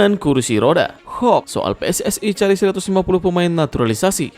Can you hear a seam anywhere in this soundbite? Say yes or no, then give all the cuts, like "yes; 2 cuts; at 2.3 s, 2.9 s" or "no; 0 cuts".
yes; 1 cut; at 1.0 s